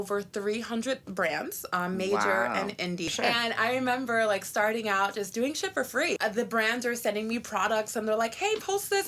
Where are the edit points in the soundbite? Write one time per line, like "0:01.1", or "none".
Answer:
0:03.1
0:06.2